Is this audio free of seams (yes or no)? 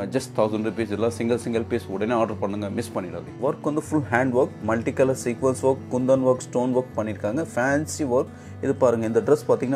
no